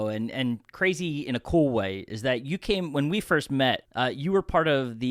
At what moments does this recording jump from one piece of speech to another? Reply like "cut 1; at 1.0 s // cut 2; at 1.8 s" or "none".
cut 1; at 3.9 s